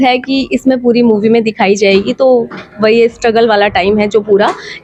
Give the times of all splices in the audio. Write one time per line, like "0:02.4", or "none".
none